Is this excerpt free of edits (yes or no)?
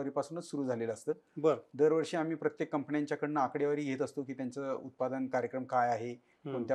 yes